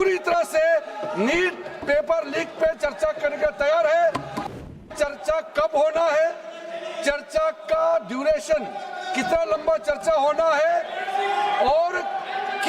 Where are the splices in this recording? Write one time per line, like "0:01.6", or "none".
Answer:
0:04.4